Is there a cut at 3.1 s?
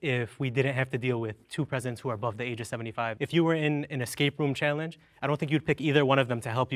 yes; 1 cut; at 3.1 s

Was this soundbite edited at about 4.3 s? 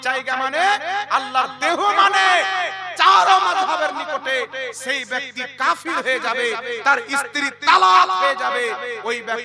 no; 0 cuts

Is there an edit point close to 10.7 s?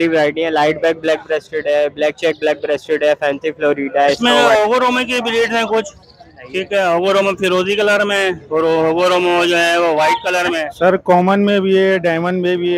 yes; 2 cuts; at 4.2 s, 10.7 s

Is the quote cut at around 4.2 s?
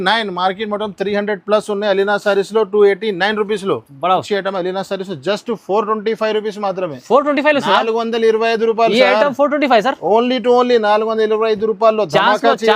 yes; 1 cut; at 4.2 s

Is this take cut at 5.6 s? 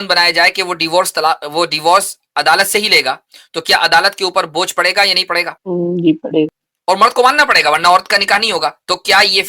yes; 2 cuts; at 5.6 s, 6.7 s

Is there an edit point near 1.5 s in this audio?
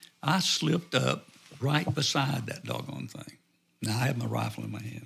yes; 1 cut; at 1.5 s

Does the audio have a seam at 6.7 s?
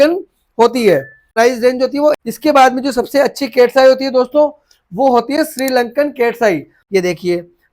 yes; 3 cuts; at 1.2 s, 2.2 s, 6.7 s

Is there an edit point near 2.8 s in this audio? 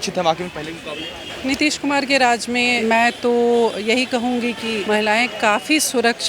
yes; 3 cuts; at 1.4 s, 2.8 s, 4.8 s

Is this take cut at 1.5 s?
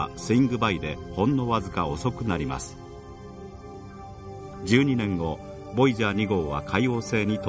yes; 1 cut; at 1.5 s

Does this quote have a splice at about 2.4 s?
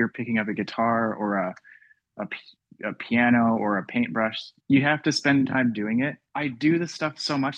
no; 2 cuts; at 4.5 s, 6.2 s

